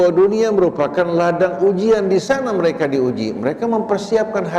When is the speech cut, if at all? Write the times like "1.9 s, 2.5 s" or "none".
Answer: none